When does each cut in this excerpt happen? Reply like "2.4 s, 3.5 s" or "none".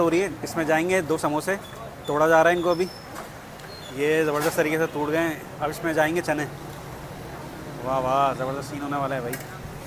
none